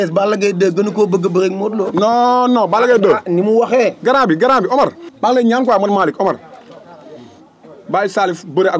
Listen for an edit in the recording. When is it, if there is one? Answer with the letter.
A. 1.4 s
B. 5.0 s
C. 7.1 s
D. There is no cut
B